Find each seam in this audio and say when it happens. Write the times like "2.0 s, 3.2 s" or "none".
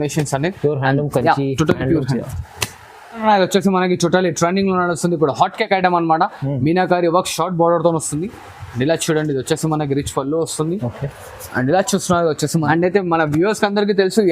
3.2 s, 12.6 s